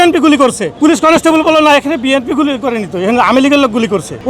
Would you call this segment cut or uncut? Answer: uncut